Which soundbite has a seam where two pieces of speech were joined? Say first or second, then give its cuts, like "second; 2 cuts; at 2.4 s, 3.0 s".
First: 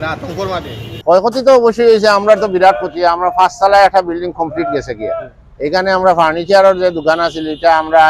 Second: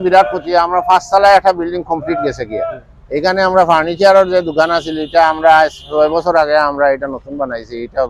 first; 1 cut; at 1.0 s